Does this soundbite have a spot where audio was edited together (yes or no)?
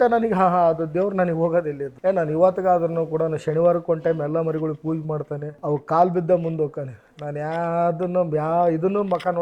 no